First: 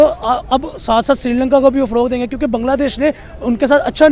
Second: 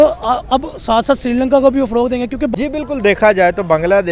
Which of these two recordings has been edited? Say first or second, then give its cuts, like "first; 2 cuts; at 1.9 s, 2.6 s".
second; 1 cut; at 2.5 s